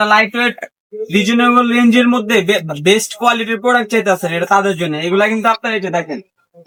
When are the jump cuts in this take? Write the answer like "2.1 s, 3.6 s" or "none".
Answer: none